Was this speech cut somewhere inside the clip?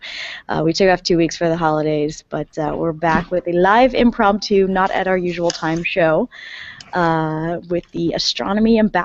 no; 0 cuts

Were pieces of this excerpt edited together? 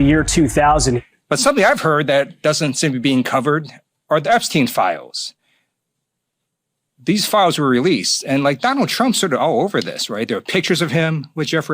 yes; 1 cut; at 1.0 s

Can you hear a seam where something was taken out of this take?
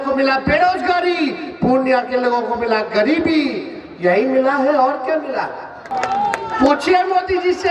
yes; 1 cut; at 5.8 s

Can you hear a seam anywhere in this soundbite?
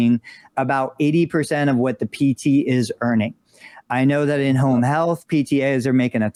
no; 0 cuts

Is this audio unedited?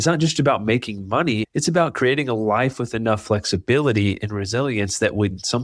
no; 1 cut; at 1.4 s

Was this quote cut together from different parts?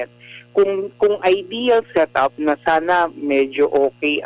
no; 0 cuts

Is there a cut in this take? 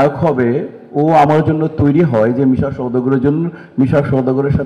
no; 0 cuts

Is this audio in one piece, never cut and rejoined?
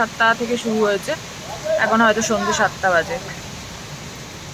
yes; 0 cuts

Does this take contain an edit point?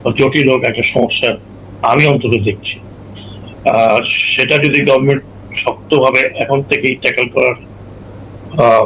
no; 0 cuts

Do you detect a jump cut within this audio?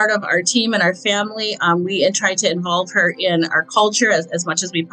no; 0 cuts

